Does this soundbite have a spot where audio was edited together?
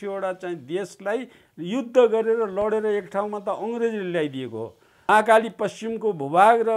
yes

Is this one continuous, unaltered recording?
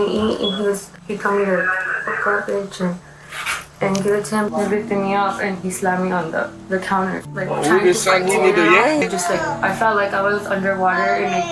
no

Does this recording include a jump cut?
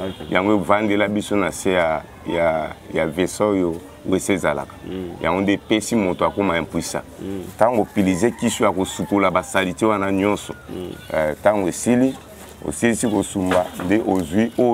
no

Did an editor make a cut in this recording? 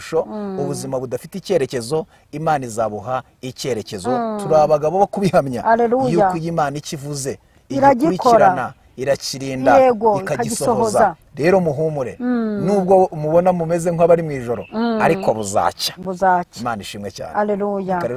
no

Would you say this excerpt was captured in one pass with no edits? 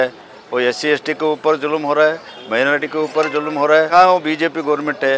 no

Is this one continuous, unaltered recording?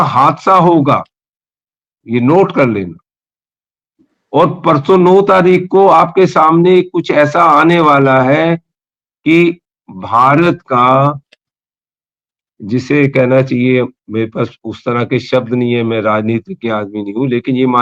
yes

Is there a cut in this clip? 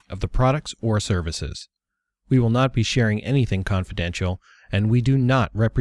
no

